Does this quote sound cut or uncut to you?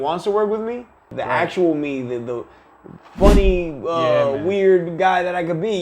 cut